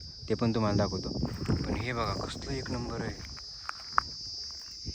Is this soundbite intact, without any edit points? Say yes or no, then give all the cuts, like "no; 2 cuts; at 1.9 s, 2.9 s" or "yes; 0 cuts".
yes; 0 cuts